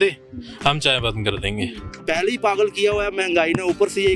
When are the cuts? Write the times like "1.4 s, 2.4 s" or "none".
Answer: 1.9 s